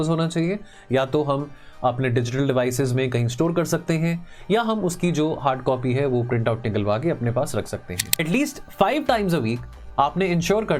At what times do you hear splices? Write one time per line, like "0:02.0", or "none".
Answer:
0:08.2